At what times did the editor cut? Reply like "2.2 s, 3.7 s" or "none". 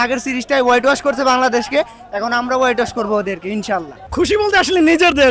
4.0 s